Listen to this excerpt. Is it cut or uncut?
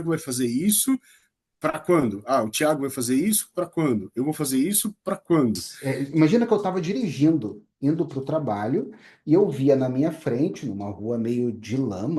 cut